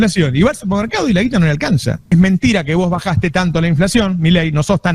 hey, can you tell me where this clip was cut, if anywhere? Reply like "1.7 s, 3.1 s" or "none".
2.0 s